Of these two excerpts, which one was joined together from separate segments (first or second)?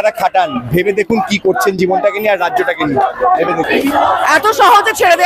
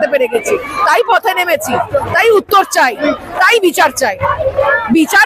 first